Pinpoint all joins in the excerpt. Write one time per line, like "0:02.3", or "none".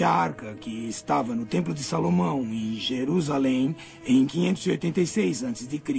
0:01.8